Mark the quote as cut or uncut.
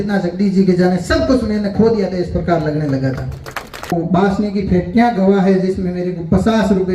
cut